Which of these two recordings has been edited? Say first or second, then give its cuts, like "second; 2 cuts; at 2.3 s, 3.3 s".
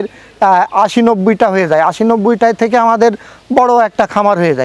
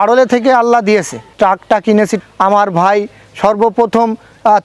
second; 2 cuts; at 1.2 s, 2.2 s